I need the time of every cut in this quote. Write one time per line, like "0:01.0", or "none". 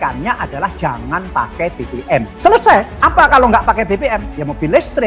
0:02.9